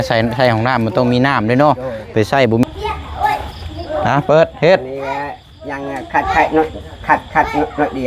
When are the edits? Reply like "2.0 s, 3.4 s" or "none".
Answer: 2.6 s